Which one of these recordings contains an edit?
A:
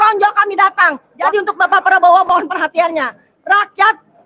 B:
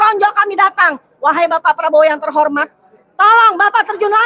A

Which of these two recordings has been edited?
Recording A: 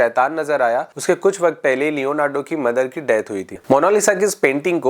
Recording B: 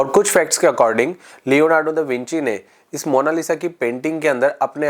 A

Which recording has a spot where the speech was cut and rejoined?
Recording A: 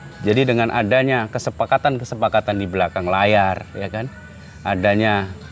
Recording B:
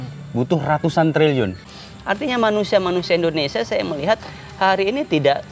B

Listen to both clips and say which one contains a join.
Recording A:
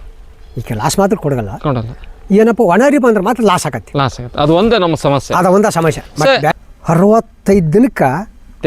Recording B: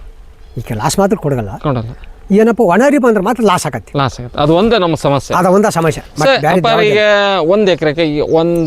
A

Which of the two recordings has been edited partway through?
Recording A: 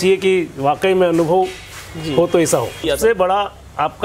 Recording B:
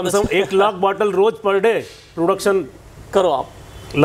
A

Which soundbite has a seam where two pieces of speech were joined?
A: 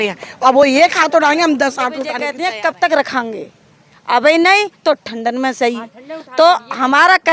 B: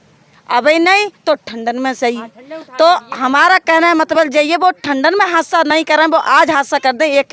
A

